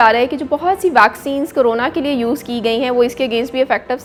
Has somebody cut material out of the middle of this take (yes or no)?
no